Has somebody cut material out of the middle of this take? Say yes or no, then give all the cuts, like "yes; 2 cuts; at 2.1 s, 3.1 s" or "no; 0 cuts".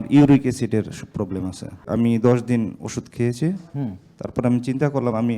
yes; 1 cut; at 1.8 s